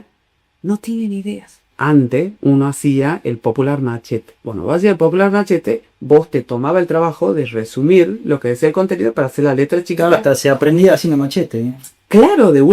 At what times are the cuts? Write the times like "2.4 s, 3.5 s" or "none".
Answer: 1.7 s